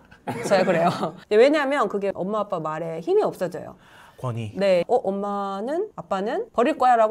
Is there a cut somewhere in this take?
no; 0 cuts

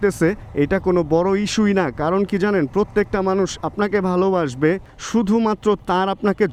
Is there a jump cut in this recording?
no; 0 cuts

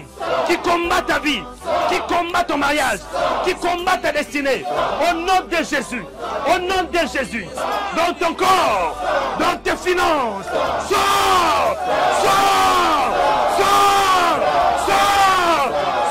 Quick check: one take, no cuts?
no; 1 cut; at 7.5 s

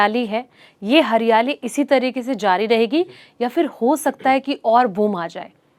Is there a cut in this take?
no; 0 cuts

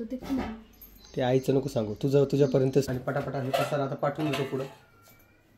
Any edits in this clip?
yes; 1 cut; at 2.9 s

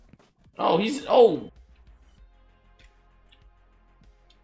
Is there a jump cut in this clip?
yes; 1 cut; at 1.5 s

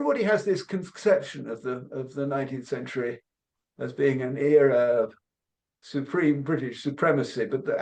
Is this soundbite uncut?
yes; 0 cuts

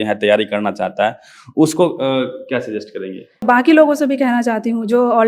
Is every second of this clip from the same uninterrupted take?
no; 1 cut; at 3.4 s

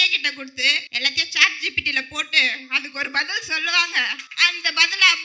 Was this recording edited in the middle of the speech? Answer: yes; 2 cuts; at 0.9 s, 4.2 s

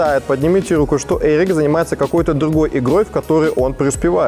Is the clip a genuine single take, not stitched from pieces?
yes; 0 cuts

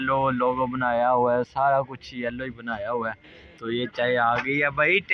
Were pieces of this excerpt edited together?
no; 0 cuts

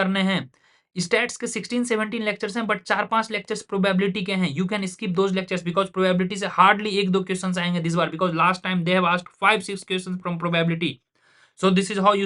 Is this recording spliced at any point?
no; 0 cuts

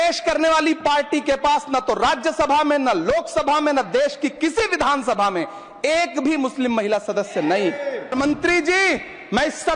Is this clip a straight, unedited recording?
no; 1 cut; at 8.1 s

